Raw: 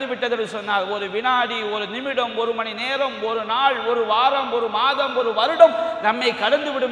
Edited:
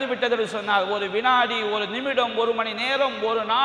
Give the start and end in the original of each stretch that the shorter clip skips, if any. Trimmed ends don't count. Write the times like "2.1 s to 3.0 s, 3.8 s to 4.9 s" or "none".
none